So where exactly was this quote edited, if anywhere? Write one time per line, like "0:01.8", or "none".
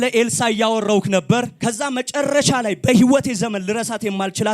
0:01.5